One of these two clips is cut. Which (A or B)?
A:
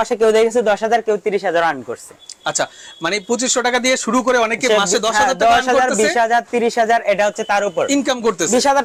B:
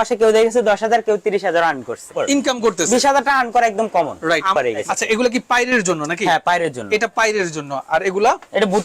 B